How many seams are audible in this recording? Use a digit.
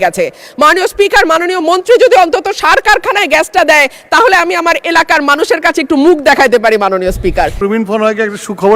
1